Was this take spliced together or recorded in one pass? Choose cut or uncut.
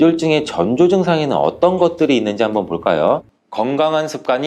cut